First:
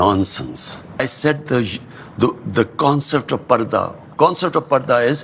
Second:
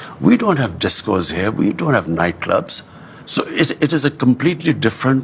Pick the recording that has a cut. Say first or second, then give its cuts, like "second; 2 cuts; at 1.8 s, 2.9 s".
first; 1 cut; at 1.0 s